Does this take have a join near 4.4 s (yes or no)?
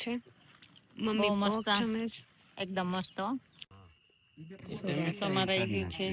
yes